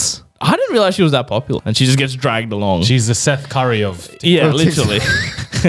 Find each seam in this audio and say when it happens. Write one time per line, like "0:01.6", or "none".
0:01.6